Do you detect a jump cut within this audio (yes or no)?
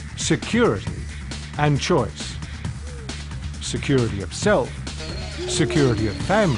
no